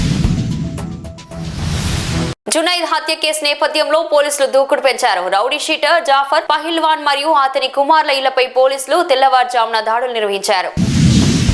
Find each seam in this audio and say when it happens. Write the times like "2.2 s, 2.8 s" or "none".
none